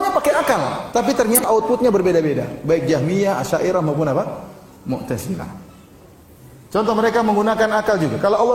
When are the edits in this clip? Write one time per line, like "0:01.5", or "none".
0:01.4

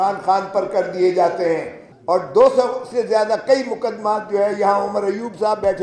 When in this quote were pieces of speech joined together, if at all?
none

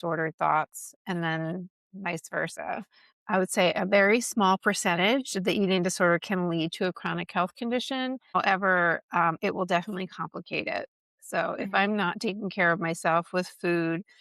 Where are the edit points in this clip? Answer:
0:01.0
0:03.1
0:08.3

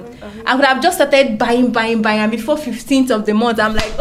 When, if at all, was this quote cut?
none

